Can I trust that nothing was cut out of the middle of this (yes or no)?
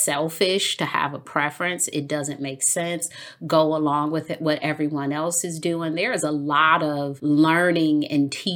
no